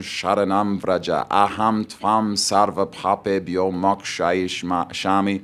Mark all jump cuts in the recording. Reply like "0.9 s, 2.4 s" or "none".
none